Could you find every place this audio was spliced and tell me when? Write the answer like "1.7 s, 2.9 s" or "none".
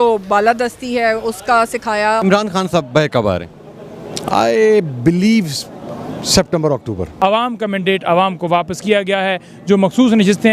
2.2 s, 7.1 s